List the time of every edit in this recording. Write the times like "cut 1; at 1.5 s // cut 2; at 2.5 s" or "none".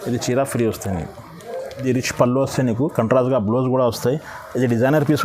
cut 1; at 1.8 s

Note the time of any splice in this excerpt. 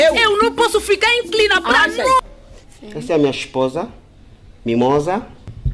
cut 1; at 2.3 s

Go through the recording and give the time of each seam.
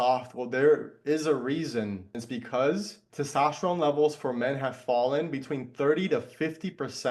cut 1; at 2.2 s // cut 2; at 3.0 s

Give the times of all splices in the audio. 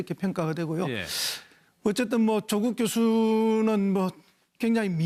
none

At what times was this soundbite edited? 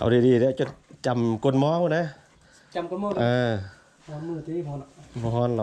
none

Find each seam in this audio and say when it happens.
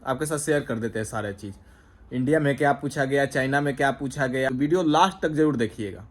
cut 1; at 4.5 s

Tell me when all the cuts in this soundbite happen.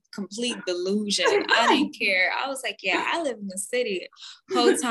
none

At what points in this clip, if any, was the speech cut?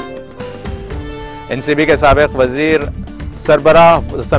none

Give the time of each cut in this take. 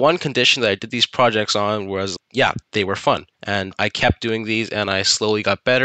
cut 1; at 2.2 s // cut 2; at 3.3 s

